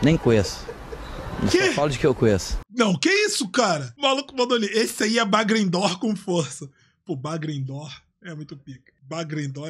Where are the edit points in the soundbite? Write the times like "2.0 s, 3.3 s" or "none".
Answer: 2.6 s, 3.9 s